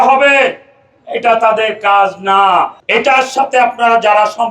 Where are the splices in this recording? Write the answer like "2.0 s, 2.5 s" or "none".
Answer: 2.8 s